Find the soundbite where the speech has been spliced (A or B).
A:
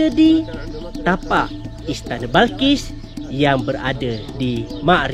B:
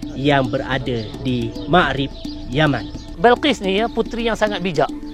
B